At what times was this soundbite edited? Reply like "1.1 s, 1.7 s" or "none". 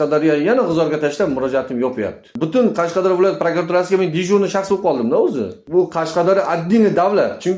2.3 s, 5.5 s